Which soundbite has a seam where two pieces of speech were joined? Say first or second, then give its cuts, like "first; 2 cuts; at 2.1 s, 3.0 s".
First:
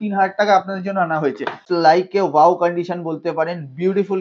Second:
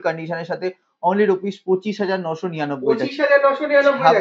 first; 1 cut; at 1.6 s